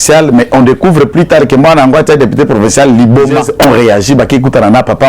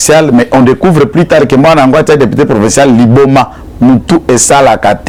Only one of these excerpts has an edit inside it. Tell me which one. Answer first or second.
first